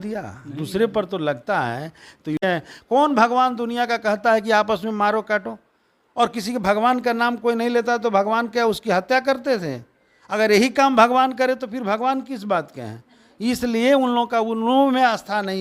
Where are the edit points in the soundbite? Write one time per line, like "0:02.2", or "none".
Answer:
0:02.4